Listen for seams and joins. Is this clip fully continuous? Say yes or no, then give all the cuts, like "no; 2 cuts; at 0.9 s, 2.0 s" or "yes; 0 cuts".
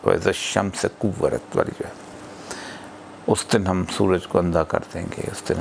yes; 0 cuts